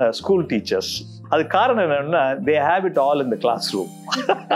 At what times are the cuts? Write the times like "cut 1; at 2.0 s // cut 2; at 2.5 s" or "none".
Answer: cut 1; at 1.1 s